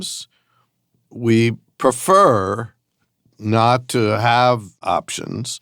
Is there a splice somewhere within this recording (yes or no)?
yes